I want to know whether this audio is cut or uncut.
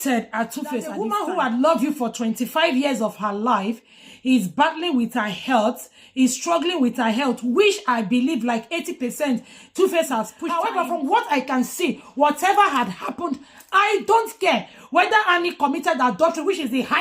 cut